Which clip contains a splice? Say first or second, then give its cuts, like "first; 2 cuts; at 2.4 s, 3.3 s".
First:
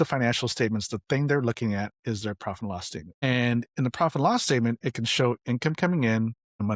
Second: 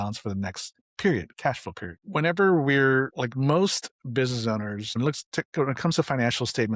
second; 1 cut; at 2.0 s